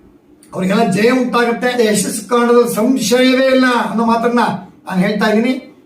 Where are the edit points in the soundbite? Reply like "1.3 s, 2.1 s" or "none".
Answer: 1.7 s